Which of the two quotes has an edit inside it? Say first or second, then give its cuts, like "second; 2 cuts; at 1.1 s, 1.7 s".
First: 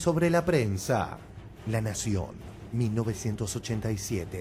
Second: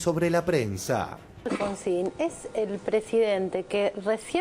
second; 1 cut; at 1.5 s